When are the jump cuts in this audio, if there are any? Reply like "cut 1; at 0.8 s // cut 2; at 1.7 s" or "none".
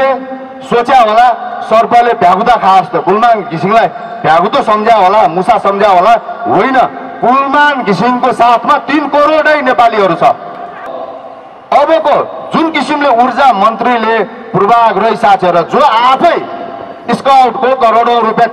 cut 1; at 10.9 s